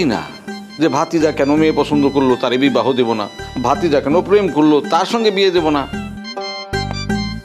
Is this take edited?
yes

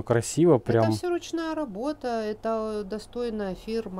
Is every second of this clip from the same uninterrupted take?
yes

